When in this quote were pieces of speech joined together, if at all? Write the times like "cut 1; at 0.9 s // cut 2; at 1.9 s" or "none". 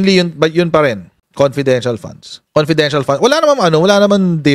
cut 1; at 2.4 s